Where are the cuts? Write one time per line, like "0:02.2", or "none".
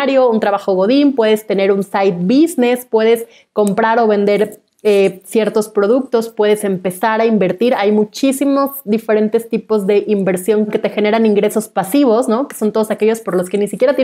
0:10.7